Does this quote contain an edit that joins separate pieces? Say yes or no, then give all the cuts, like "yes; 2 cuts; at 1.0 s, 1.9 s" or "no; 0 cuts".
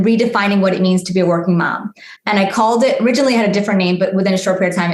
no; 0 cuts